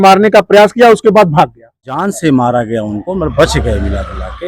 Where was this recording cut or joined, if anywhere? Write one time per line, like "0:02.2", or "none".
0:02.0